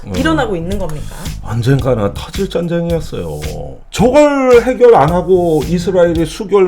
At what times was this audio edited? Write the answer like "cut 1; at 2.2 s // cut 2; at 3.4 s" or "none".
cut 1; at 3.8 s